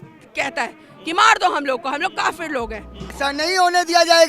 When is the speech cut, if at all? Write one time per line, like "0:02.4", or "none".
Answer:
0:03.1